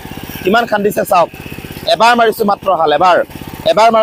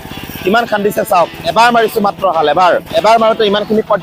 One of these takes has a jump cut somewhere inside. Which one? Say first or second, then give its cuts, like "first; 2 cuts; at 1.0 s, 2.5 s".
second; 2 cuts; at 1.4 s, 2.9 s